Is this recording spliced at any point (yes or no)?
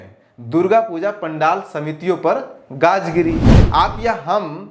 yes